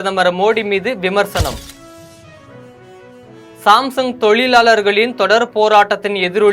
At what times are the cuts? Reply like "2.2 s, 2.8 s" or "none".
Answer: 1.6 s, 3.5 s

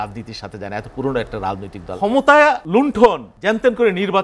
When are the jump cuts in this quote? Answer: 1.9 s, 2.6 s, 3.3 s

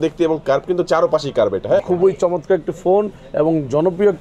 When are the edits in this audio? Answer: 1.8 s

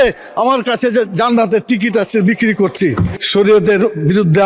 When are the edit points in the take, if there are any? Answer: 3.1 s

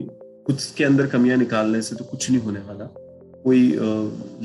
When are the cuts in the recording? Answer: none

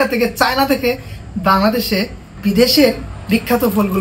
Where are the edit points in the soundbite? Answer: 2.3 s

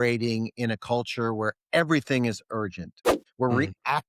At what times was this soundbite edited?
3.1 s

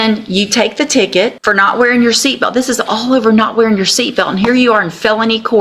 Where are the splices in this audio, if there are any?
1.4 s

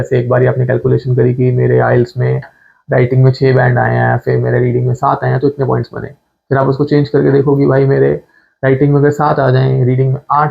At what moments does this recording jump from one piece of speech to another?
none

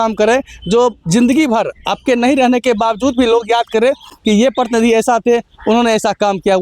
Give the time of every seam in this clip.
none

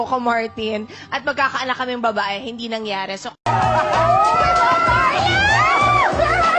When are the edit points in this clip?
3.4 s

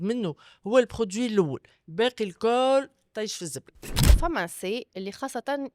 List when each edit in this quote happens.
4.1 s

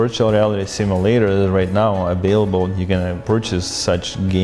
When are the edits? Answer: 3.2 s

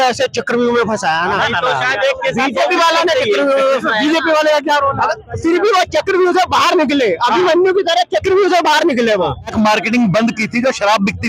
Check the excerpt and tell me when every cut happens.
none

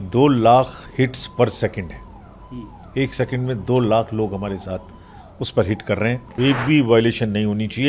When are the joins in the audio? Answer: 6.4 s

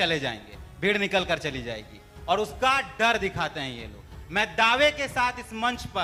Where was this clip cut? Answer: none

